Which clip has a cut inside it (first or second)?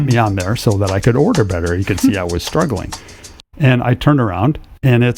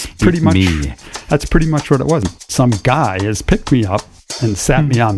second